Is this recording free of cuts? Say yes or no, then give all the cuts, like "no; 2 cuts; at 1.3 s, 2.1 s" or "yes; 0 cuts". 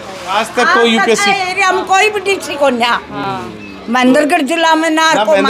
yes; 0 cuts